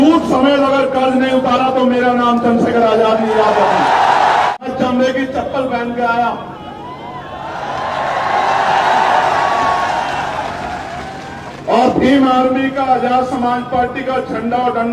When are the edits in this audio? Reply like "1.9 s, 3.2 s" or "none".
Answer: 4.5 s